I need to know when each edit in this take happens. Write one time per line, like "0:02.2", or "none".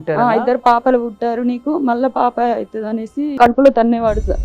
0:03.3